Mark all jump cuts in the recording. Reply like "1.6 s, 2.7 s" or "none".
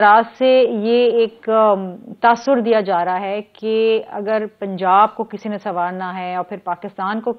none